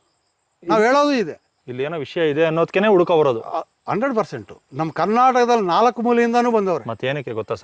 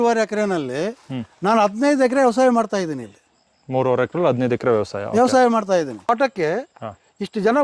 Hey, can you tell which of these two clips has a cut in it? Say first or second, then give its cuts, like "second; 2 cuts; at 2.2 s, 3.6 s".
second; 1 cut; at 6.1 s